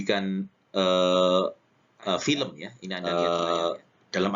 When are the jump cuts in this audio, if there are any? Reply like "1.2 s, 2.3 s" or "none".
2.7 s